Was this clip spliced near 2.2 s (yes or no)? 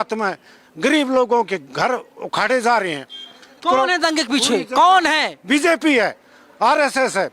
no